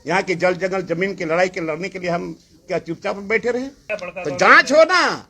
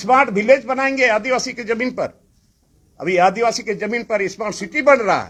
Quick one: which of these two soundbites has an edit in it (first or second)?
first